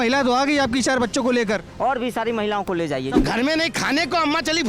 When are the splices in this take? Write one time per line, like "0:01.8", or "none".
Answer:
0:03.1